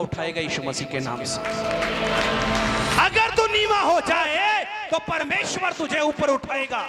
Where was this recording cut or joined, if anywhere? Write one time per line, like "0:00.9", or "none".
none

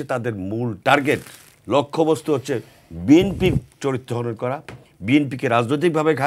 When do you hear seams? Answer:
none

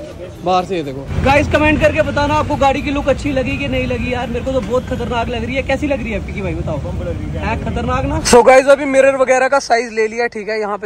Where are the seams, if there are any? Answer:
0:01.1
0:08.2

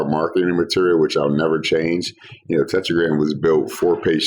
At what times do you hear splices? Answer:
none

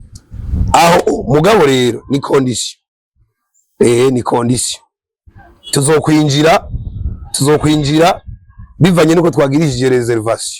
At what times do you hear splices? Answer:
none

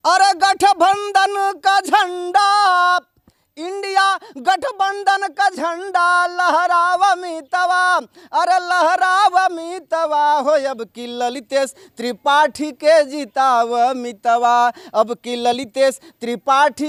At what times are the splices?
none

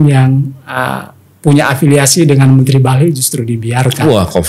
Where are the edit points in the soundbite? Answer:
none

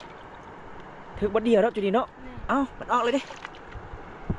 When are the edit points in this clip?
none

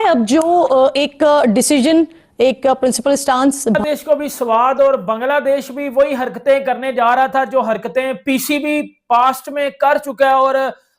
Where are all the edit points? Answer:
0:03.8

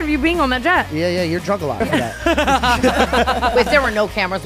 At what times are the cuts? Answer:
0:00.9
0:01.8
0:03.5

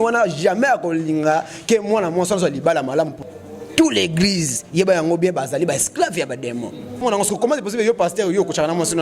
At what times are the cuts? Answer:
0:03.2
0:07.0

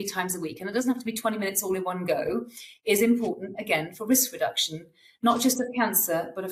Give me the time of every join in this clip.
none

